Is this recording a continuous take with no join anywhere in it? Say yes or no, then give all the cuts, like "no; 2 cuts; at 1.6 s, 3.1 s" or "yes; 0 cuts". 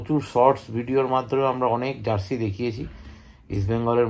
yes; 0 cuts